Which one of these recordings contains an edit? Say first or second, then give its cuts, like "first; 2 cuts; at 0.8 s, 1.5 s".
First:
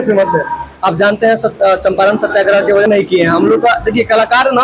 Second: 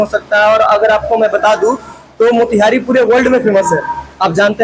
first; 1 cut; at 2.9 s